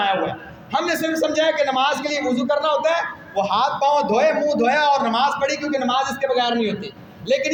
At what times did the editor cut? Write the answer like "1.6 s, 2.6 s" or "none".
none